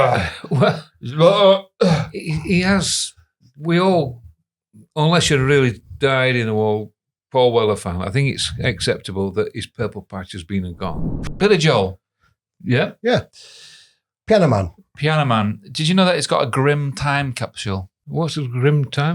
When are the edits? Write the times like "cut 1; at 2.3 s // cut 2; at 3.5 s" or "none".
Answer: cut 1; at 11.1 s // cut 2; at 18.0 s